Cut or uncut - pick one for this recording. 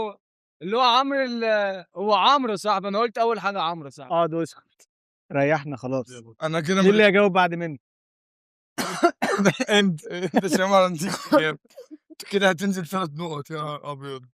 uncut